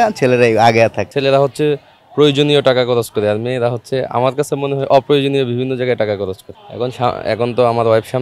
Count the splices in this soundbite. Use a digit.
2